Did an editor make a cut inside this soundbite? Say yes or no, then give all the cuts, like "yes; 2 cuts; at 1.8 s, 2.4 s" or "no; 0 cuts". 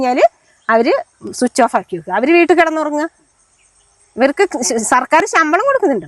no; 0 cuts